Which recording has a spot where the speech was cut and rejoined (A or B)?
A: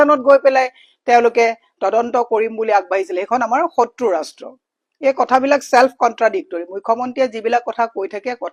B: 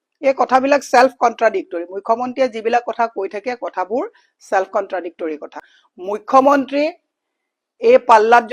B